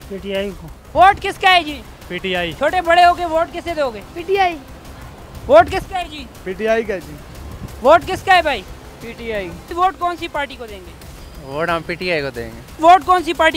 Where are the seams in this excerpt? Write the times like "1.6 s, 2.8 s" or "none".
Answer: 2.5 s, 9.6 s, 12.7 s